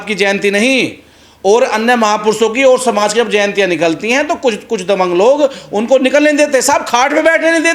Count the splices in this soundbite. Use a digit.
0